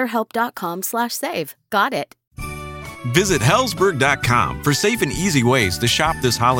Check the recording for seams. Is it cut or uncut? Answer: cut